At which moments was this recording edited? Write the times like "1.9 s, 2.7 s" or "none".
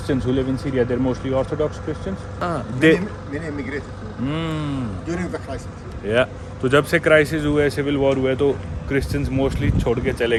none